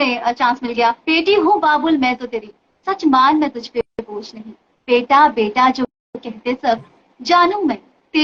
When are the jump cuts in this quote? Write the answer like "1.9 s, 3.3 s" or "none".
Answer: 1.0 s